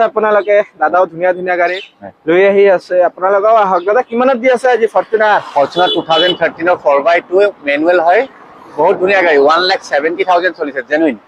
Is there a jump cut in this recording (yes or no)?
no